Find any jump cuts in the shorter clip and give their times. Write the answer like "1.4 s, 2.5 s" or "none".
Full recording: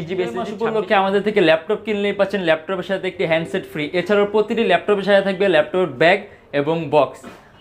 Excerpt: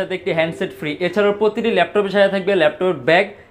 none